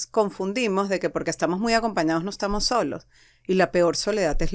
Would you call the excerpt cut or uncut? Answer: uncut